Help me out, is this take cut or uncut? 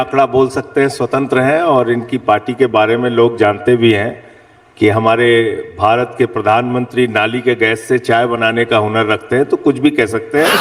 uncut